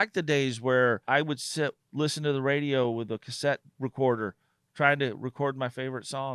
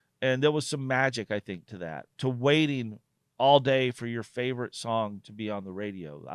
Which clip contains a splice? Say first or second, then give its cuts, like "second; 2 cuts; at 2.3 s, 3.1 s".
first; 2 cuts; at 1.0 s, 3.7 s